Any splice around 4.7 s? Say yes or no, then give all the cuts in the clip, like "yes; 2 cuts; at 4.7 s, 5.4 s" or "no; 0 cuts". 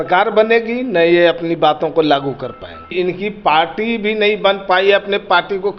no; 1 cut; at 2.9 s